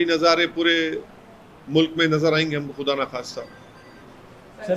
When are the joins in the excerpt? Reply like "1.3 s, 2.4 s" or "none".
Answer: none